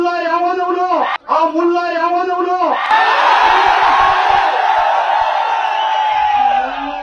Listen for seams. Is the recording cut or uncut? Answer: uncut